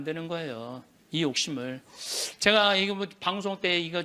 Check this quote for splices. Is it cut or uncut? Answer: uncut